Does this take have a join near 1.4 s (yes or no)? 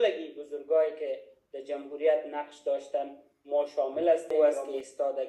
no